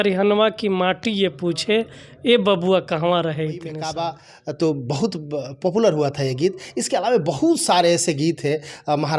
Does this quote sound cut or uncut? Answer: cut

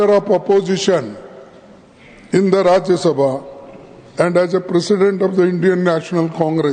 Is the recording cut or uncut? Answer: uncut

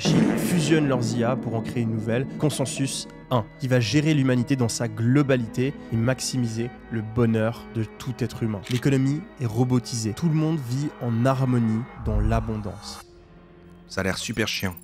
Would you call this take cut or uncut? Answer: cut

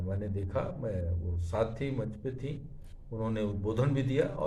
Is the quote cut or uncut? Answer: uncut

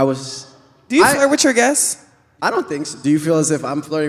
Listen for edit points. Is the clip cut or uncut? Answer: uncut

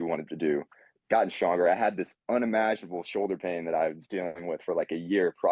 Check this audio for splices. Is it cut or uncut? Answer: uncut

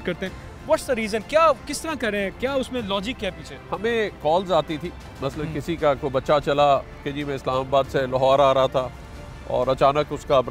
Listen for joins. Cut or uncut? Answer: uncut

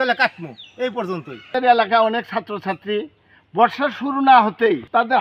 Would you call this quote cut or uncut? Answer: cut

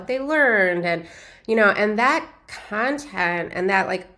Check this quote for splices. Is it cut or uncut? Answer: uncut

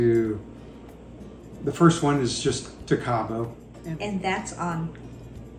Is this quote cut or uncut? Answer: cut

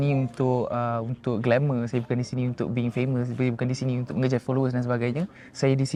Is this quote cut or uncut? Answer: uncut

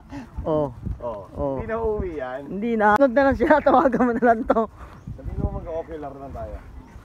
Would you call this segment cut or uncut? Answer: cut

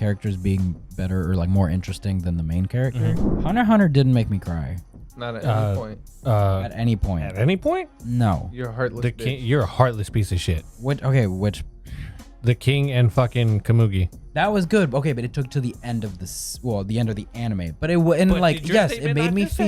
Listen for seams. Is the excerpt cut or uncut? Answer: cut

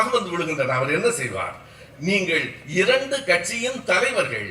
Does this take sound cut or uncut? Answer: uncut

